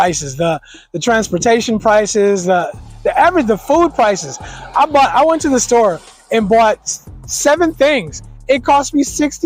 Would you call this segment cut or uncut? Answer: uncut